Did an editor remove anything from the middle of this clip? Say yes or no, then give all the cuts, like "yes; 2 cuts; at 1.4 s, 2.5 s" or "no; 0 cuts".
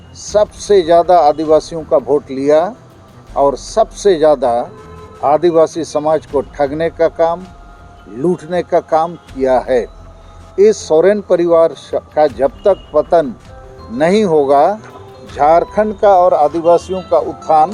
no; 0 cuts